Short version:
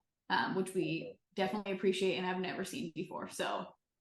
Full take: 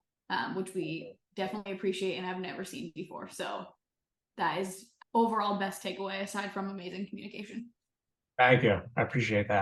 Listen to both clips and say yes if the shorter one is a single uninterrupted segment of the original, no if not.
yes